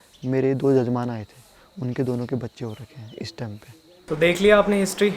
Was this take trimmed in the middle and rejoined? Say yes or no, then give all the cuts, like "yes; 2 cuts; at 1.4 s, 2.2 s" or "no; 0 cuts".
yes; 1 cut; at 4.0 s